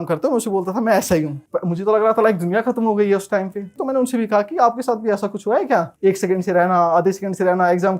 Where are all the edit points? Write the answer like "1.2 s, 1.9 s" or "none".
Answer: 1.4 s, 3.7 s, 5.9 s